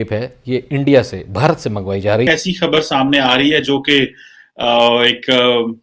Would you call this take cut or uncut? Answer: cut